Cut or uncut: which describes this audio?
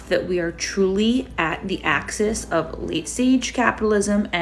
uncut